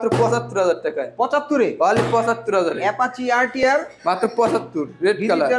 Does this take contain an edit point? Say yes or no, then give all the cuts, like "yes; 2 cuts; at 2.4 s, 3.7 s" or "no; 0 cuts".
no; 0 cuts